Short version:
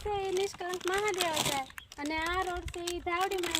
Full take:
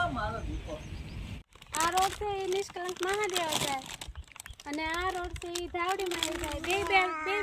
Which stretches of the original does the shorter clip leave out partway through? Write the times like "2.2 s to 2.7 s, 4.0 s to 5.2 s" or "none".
4.0 s to 4.5 s

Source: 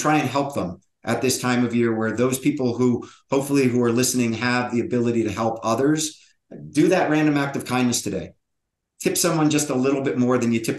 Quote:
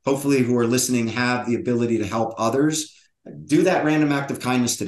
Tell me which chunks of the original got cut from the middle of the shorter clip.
none

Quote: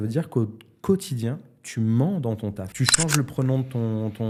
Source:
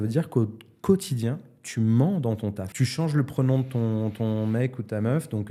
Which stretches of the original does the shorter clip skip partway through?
none

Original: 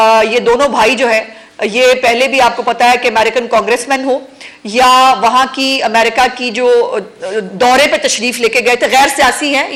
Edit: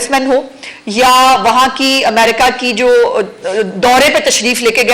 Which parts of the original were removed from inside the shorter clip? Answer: none

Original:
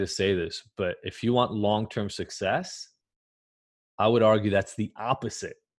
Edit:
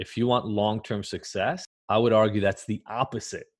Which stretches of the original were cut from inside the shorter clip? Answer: 2.8 s to 3.8 s

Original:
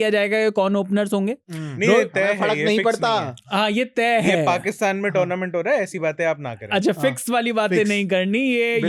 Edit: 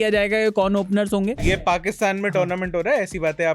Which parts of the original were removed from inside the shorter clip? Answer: 1.6 s to 4.4 s

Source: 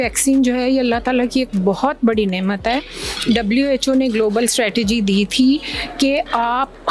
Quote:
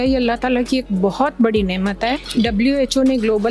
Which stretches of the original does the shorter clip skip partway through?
2.9 s to 3.1 s

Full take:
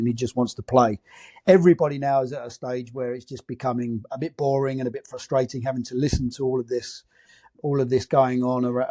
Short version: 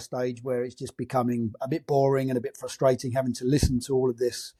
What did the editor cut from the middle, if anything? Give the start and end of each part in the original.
none

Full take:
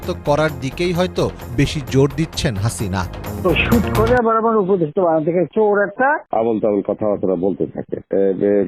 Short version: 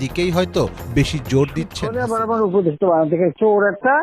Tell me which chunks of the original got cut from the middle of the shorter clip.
2.6 s to 4.1 s

